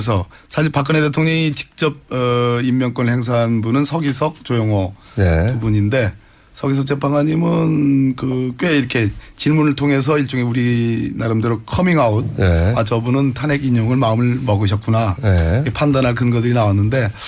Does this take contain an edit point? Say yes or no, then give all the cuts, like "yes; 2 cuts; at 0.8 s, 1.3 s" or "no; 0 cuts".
yes; 1 cut; at 9.5 s